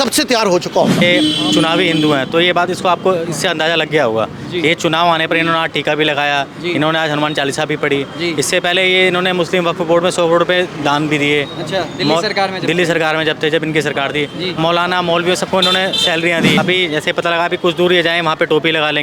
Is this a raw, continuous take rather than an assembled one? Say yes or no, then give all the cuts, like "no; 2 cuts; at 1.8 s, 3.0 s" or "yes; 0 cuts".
no; 2 cuts; at 1.0 s, 16.6 s